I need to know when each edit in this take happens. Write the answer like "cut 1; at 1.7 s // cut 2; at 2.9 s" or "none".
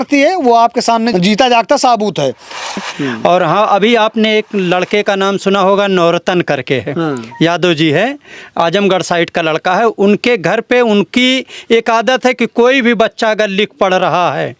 cut 1; at 1.1 s // cut 2; at 2.9 s